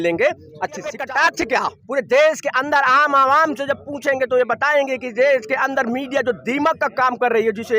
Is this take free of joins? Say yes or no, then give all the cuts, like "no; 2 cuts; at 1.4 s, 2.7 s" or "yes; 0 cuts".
no; 1 cut; at 1.0 s